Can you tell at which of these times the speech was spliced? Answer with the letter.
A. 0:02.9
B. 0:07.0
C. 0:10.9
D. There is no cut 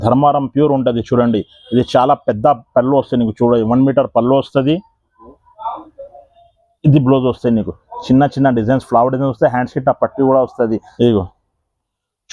C